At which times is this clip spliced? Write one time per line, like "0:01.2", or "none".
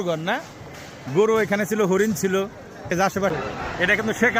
0:03.3